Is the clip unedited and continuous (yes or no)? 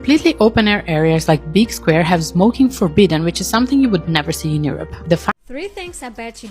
no